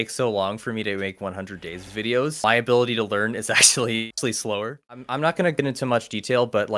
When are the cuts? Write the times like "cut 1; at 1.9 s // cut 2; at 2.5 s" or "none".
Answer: cut 1; at 5.0 s